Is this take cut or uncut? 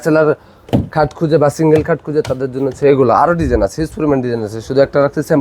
uncut